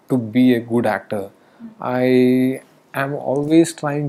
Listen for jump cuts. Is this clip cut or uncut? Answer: uncut